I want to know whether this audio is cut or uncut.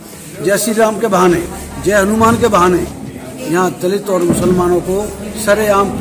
uncut